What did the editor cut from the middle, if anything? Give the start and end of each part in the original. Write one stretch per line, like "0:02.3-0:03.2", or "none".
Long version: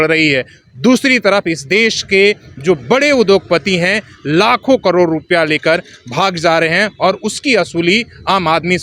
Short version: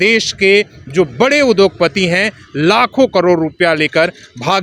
none